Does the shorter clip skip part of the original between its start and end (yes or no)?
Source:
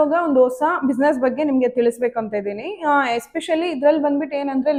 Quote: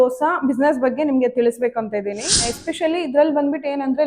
yes